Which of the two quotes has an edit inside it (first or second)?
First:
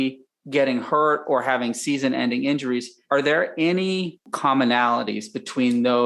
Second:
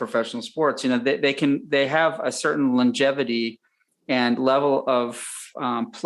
first